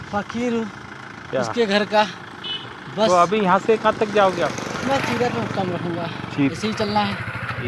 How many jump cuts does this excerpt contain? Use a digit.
1